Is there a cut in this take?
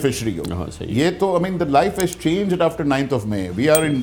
no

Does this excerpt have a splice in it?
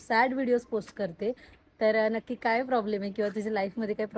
no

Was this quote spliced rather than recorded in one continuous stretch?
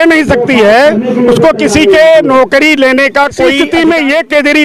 yes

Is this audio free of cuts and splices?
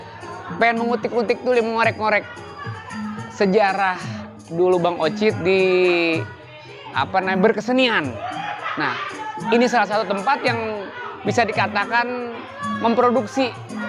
yes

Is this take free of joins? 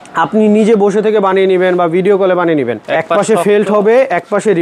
no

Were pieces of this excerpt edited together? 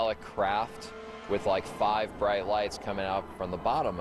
no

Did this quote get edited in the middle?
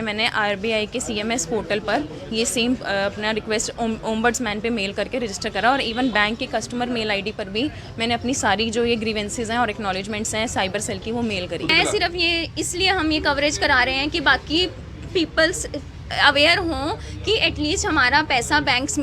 yes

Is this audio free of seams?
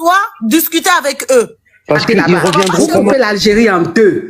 no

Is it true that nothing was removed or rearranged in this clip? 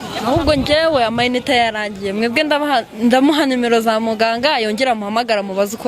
yes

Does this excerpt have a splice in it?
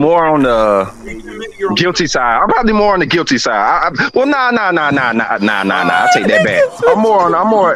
no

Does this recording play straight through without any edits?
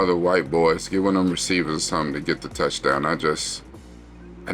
yes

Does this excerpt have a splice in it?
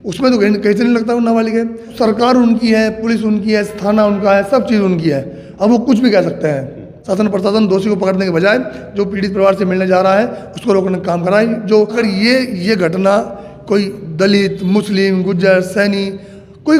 yes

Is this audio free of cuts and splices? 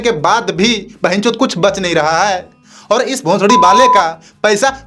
yes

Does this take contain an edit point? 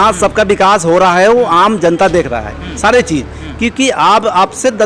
no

